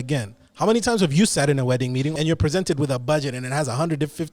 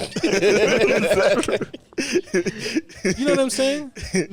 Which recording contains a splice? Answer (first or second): first